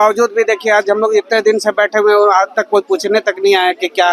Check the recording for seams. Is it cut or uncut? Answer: uncut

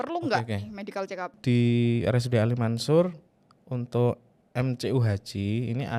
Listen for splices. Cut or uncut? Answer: cut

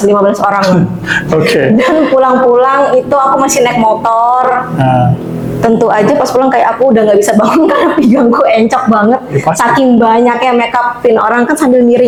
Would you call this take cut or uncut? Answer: uncut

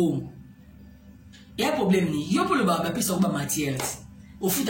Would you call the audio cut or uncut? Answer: uncut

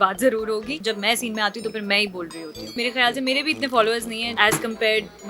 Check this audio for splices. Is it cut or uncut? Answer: cut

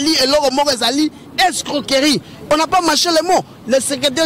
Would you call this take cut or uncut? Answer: uncut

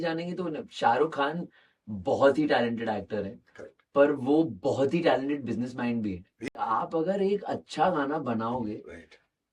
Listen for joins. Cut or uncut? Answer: cut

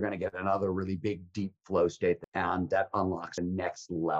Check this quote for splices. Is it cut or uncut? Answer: cut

